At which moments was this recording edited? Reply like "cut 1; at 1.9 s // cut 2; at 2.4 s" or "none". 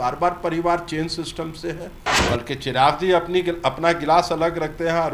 cut 1; at 2.1 s